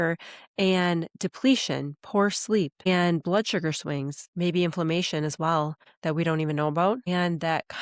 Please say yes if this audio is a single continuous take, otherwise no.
no